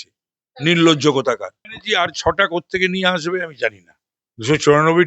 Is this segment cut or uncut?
cut